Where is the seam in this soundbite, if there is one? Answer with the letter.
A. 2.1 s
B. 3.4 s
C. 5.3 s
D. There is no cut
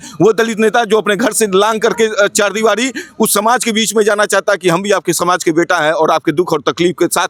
D